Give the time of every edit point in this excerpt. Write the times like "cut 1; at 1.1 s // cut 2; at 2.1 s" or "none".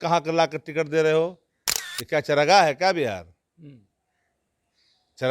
none